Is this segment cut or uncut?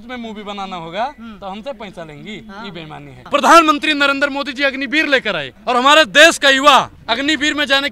cut